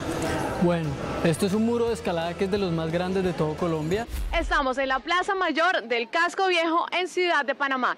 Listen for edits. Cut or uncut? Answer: cut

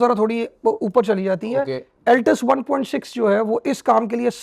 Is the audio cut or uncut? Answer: uncut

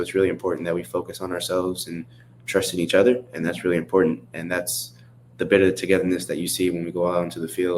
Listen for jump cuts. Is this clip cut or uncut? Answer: uncut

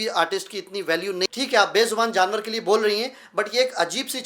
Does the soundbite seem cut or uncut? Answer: cut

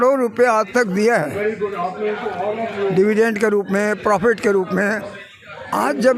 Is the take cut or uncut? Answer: uncut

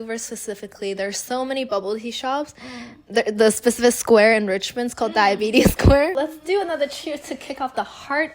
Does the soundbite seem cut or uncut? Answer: cut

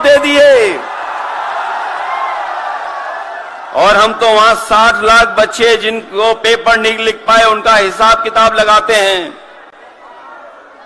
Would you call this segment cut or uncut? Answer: uncut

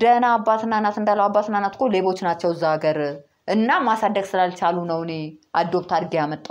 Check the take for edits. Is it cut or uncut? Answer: uncut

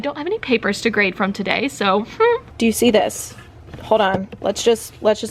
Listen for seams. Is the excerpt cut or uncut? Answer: cut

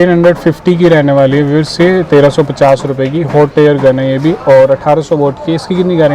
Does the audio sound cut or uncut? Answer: uncut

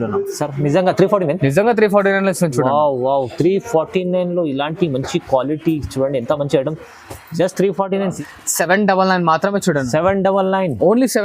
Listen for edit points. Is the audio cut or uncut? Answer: cut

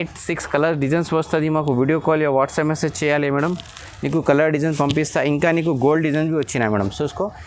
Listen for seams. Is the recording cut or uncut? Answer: uncut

